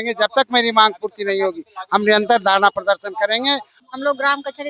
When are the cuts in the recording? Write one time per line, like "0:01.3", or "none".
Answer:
0:03.7